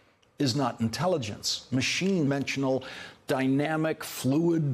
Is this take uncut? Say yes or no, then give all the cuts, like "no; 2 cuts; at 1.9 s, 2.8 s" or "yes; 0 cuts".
yes; 0 cuts